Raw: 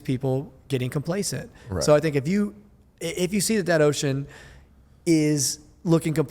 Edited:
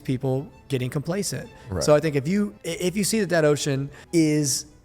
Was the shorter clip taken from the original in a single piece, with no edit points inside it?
no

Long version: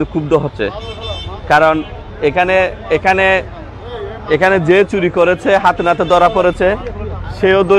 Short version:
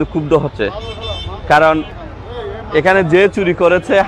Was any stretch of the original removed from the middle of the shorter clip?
yes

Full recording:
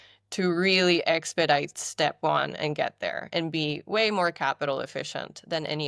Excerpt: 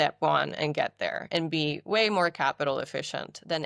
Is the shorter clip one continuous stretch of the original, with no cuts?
yes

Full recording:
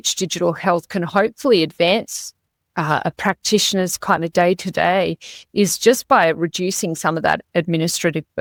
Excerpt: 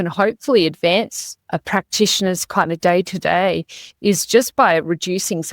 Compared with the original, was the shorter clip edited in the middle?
yes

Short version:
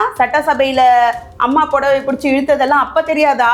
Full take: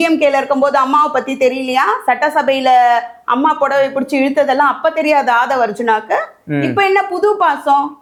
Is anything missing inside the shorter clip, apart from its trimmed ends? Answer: no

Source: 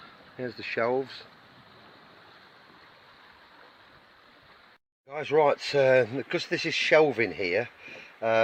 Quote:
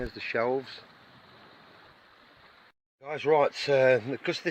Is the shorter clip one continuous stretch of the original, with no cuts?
no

